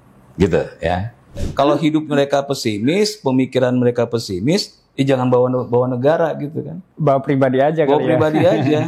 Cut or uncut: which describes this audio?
cut